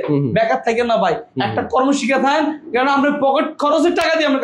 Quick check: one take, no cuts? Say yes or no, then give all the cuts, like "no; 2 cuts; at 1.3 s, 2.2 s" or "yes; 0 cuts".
yes; 0 cuts